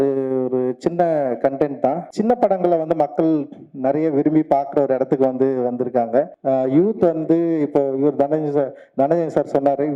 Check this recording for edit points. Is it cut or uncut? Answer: cut